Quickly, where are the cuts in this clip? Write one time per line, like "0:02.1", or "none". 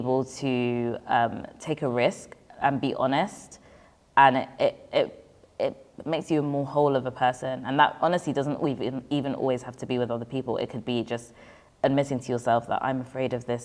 none